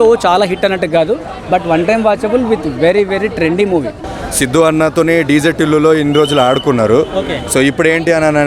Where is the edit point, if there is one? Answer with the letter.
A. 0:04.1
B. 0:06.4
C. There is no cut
A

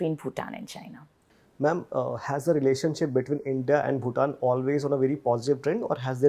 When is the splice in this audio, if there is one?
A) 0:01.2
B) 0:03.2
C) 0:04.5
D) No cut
D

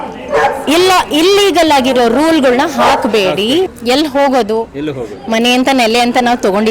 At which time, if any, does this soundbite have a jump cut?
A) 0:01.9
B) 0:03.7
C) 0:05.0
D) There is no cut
B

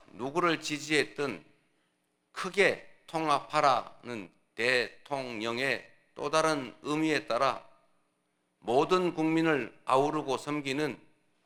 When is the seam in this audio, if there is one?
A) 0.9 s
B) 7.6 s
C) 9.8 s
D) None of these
D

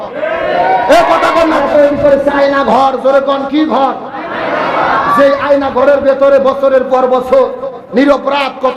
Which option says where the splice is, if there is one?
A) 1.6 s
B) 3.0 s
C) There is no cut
A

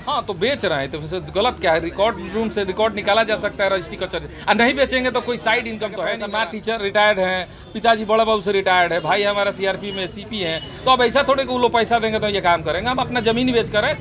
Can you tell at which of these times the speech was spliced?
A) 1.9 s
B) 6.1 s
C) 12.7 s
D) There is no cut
B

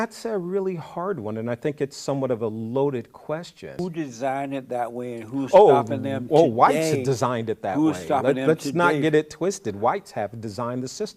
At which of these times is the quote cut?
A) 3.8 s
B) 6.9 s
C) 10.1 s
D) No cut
A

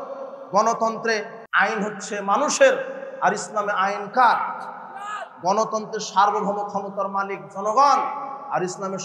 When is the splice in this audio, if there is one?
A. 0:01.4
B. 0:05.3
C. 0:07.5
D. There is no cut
A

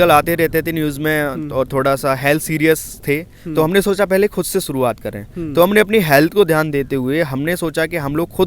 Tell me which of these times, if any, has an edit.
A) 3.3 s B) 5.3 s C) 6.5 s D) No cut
D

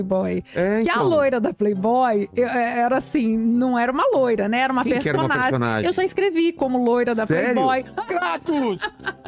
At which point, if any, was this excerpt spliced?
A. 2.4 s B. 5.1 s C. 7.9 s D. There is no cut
C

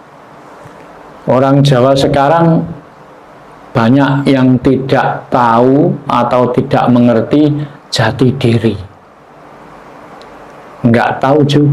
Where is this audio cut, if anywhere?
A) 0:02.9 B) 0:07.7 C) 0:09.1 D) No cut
C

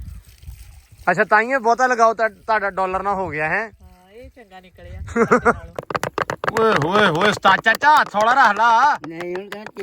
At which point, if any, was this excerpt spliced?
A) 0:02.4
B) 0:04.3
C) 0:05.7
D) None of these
C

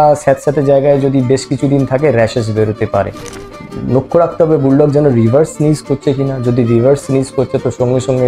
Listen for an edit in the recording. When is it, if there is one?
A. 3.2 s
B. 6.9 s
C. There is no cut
A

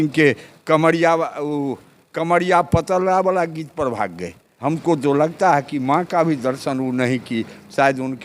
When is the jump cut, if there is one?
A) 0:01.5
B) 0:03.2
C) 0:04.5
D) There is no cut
C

